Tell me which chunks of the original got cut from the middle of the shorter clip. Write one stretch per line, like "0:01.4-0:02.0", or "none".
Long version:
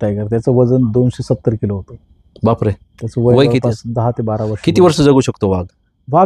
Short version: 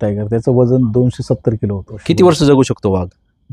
0:01.9-0:04.5